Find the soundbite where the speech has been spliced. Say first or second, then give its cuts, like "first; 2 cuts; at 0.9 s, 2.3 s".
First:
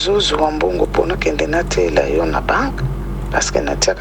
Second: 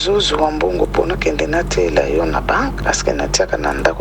second; 1 cut; at 2.8 s